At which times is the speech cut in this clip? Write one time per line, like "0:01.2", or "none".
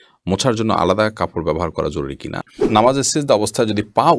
0:02.7